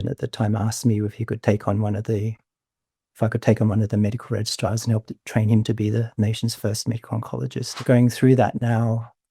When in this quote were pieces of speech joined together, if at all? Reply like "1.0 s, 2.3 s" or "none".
7.7 s

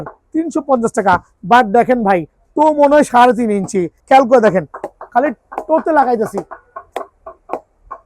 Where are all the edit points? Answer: 3.9 s

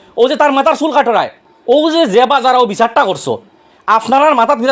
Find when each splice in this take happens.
1.5 s

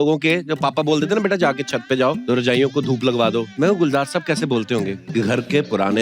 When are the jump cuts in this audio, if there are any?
2.2 s, 3.5 s, 5.0 s

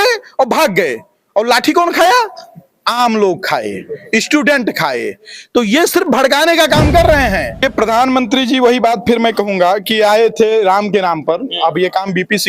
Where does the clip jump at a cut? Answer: 7.7 s

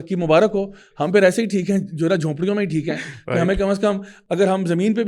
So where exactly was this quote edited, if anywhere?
none

